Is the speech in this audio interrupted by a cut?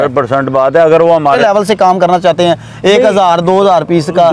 yes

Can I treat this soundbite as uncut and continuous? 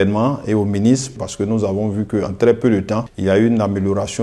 no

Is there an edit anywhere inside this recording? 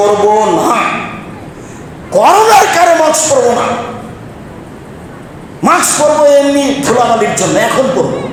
no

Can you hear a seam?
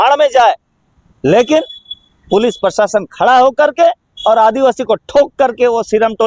no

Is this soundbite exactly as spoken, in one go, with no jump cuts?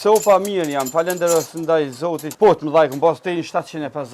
no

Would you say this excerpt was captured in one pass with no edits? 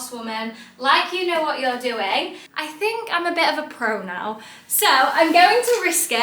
no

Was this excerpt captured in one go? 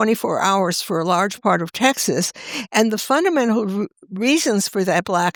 yes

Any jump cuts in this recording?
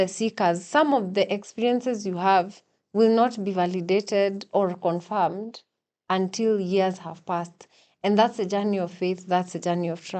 no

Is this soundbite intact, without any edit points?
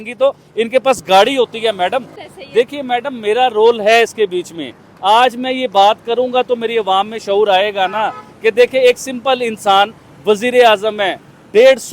no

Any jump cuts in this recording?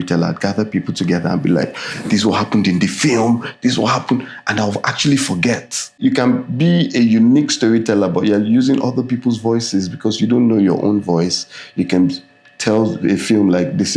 yes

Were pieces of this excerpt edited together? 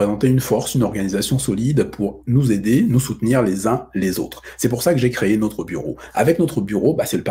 no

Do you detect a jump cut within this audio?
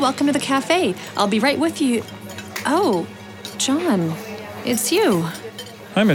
no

